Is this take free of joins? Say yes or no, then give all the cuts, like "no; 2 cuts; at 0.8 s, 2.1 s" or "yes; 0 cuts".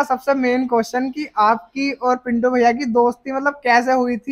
yes; 0 cuts